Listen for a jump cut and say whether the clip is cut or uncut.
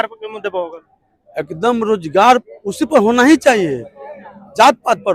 uncut